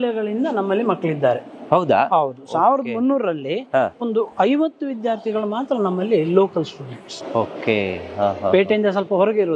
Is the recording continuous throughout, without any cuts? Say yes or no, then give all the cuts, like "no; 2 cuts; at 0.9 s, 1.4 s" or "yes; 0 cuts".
yes; 0 cuts